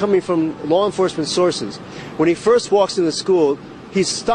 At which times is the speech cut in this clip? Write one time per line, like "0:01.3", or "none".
none